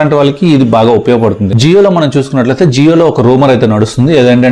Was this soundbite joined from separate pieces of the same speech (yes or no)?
yes